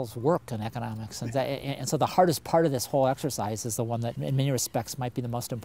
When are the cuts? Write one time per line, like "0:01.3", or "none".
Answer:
none